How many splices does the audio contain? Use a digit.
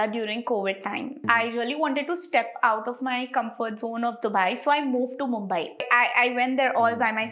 2